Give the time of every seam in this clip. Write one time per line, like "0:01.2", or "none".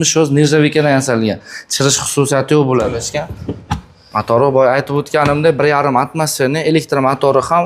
0:03.0